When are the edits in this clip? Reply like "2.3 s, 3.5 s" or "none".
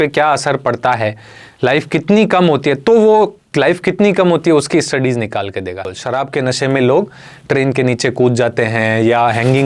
5.9 s